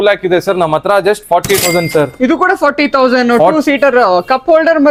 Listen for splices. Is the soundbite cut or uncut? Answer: uncut